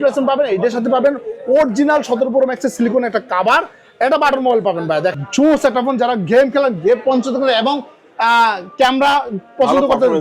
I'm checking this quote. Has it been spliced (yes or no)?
yes